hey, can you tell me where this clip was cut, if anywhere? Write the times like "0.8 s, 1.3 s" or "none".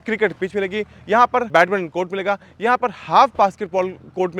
1.5 s